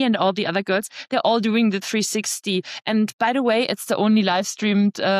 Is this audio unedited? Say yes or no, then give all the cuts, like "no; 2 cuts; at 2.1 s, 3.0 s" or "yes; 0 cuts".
yes; 0 cuts